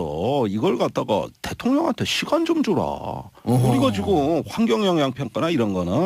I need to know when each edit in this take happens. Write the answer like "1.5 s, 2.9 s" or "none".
2.5 s